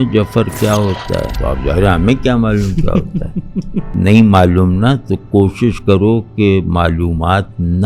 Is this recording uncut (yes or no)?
no